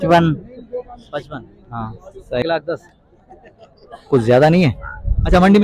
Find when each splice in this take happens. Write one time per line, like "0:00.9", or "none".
0:02.4